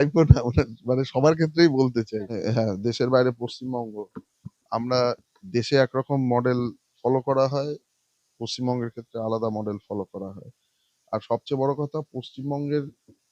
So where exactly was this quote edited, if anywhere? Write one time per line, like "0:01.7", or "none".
0:02.4